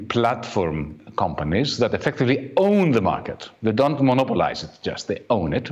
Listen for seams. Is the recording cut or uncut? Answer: uncut